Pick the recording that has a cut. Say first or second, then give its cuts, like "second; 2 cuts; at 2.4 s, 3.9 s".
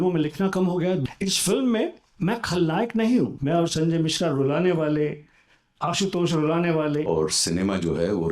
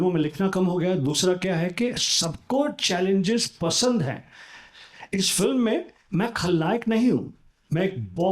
first; 3 cuts; at 1.0 s, 3.4 s, 7.0 s